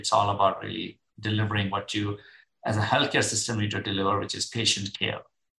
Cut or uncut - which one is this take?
uncut